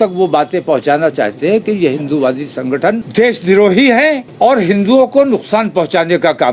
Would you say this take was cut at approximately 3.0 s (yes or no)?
yes